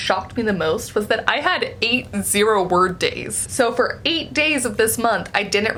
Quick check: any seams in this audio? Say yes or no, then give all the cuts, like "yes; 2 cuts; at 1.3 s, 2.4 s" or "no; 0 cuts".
no; 0 cuts